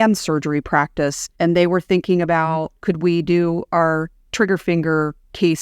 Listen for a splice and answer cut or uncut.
cut